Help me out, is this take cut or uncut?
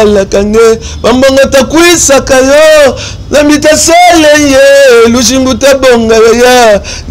uncut